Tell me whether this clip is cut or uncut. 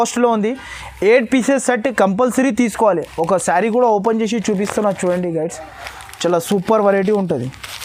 uncut